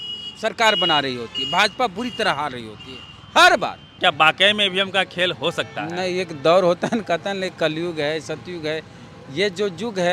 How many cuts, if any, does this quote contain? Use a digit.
1